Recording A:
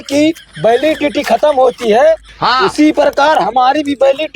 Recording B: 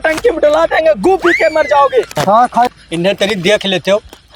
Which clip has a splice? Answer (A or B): B